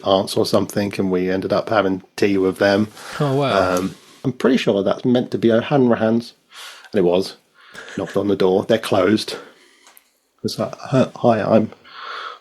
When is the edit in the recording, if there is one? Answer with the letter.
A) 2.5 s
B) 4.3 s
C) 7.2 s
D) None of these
B